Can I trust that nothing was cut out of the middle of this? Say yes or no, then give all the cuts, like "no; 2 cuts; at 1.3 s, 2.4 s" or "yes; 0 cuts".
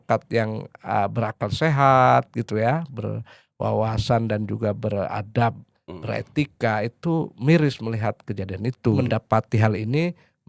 no; 1 cut; at 9.0 s